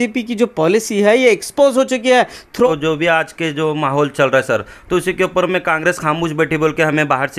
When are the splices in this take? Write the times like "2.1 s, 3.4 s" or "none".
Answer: 2.7 s